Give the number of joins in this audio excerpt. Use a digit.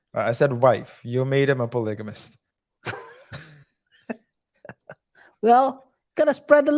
0